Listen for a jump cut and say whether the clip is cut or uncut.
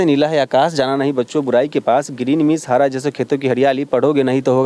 uncut